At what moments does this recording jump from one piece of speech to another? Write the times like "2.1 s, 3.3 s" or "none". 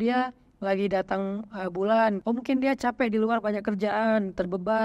2.2 s